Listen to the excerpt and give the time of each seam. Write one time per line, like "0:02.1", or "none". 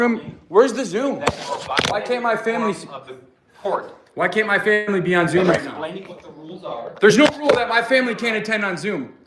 none